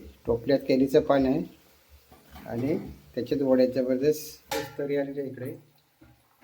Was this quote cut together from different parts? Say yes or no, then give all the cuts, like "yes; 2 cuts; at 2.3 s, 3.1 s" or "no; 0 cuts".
yes; 1 cut; at 4.5 s